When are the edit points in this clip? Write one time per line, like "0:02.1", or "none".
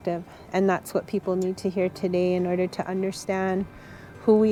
none